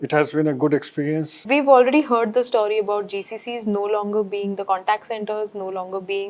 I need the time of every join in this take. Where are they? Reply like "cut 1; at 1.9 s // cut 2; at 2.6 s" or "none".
cut 1; at 1.4 s